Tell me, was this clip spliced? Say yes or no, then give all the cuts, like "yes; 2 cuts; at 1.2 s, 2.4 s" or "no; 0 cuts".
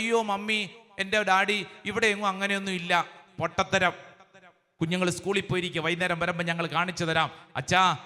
yes; 1 cut; at 4.7 s